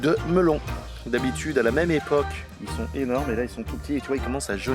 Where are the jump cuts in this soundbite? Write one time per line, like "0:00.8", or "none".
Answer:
none